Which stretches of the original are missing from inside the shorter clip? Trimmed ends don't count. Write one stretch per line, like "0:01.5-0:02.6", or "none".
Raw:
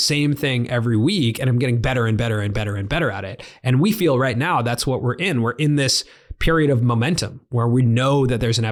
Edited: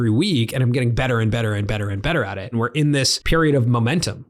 0:03.6-0:05.9

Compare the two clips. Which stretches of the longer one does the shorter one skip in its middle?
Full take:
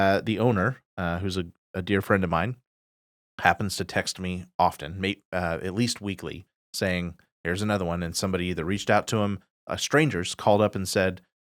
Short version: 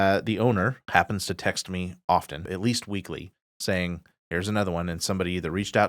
0:00.8-0:03.3
0:05.0-0:05.6

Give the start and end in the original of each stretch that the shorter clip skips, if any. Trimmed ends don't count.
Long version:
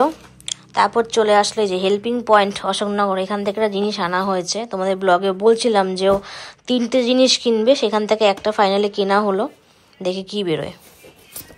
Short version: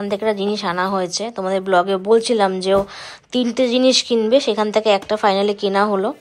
none

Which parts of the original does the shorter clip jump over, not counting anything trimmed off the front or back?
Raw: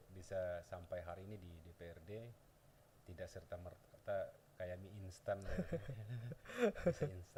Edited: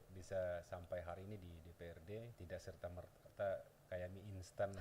0:02.4-0:03.0

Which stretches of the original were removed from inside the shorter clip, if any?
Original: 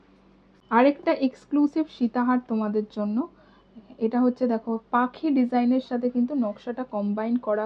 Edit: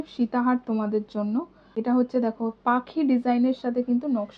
0:03.4-0:03.9

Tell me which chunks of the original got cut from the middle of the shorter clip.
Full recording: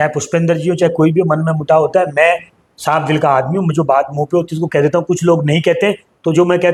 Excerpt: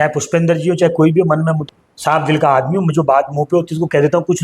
0:01.6-0:02.4

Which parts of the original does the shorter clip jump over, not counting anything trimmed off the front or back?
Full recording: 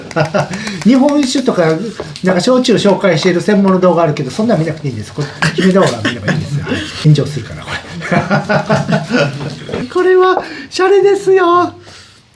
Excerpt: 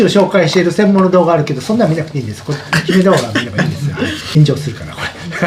none

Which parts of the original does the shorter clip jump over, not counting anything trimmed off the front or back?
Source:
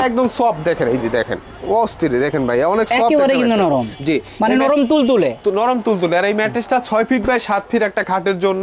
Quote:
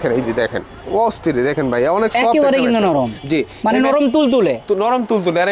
none

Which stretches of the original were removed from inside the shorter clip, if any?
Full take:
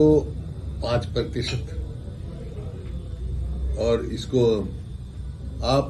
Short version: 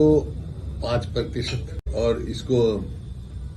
0:01.8-0:03.6

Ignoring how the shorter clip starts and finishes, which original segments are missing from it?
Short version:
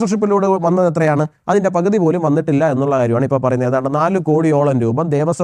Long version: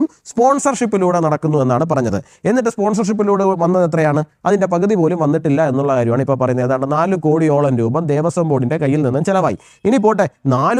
none

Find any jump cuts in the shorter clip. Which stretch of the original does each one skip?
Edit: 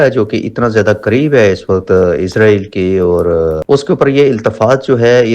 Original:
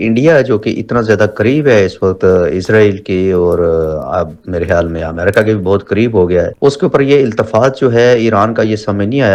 0:03.9-0:06.5

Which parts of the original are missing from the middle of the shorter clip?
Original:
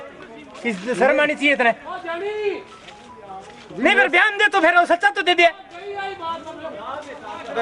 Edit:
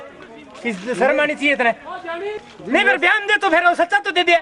0:02.4-0:03.5

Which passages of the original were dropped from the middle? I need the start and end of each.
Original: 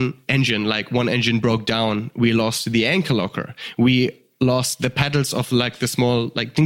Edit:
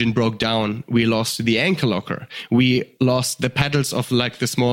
0:04.2-0:04.3

